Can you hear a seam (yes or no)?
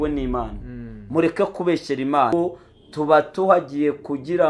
yes